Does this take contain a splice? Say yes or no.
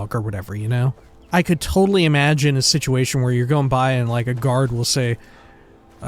yes